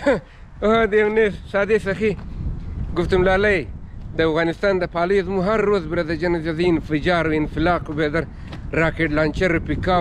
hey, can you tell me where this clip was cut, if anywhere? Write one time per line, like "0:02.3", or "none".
none